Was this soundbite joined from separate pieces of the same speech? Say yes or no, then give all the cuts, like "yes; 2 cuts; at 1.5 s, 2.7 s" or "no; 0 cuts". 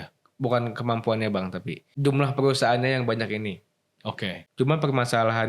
yes; 2 cuts; at 1.8 s, 4.4 s